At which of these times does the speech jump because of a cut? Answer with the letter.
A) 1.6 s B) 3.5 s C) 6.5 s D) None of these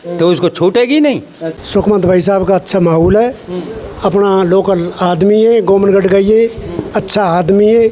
A